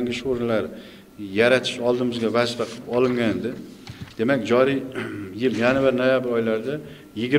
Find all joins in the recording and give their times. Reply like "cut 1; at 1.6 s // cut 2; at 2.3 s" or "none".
none